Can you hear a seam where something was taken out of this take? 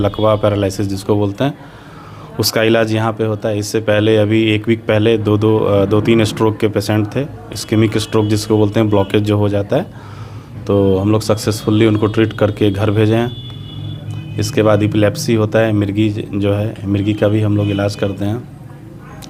no; 0 cuts

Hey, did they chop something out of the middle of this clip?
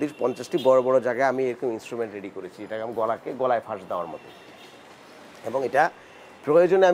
no; 0 cuts

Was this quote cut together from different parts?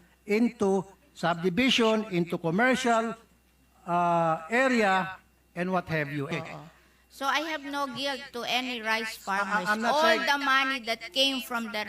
yes; 1 cut; at 6.3 s

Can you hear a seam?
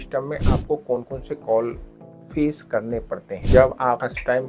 no; 0 cuts

